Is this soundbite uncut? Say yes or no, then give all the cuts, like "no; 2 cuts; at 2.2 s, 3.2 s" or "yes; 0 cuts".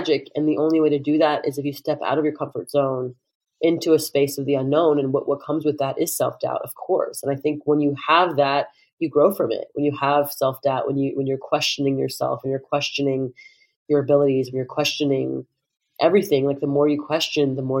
yes; 0 cuts